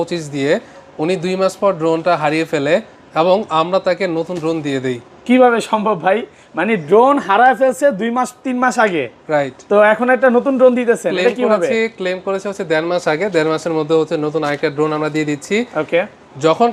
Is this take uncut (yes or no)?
yes